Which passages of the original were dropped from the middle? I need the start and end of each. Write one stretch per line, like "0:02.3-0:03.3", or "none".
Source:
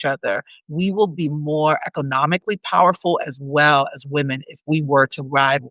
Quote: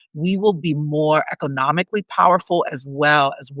none

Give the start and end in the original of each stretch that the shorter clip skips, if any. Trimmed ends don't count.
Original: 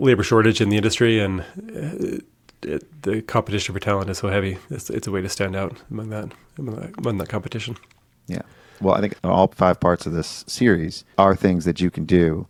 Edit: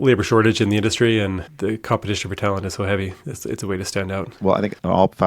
0:01.5-0:02.9
0:05.8-0:08.7

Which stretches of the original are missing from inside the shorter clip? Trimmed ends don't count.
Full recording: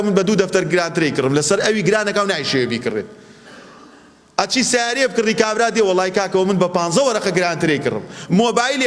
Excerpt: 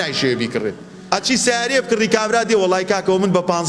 0:03.2-0:04.2

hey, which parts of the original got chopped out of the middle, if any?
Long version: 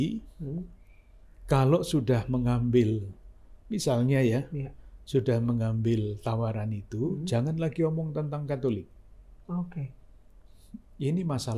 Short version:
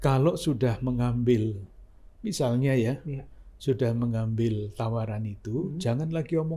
none

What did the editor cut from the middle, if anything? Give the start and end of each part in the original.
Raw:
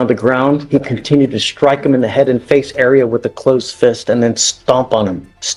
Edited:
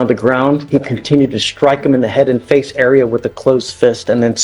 none

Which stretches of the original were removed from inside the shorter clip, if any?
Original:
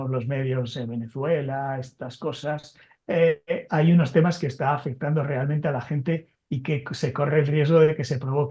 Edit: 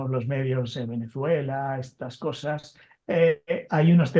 none

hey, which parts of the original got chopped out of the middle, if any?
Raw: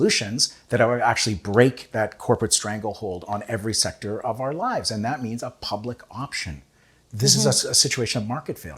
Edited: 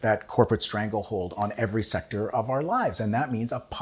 none

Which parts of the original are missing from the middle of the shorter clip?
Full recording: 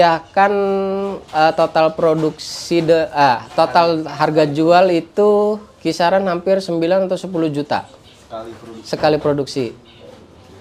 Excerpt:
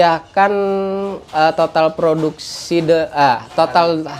none

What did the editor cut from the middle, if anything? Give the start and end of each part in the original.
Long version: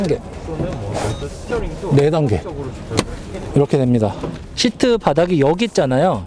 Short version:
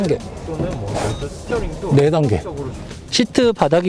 0:02.8-0:04.3

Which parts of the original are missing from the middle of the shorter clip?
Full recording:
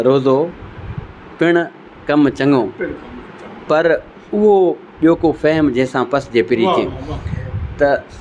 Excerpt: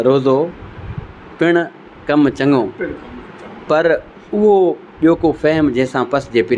none

